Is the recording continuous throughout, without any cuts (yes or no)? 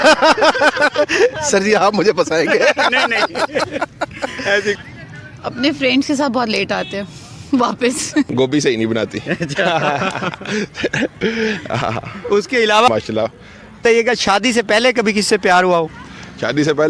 no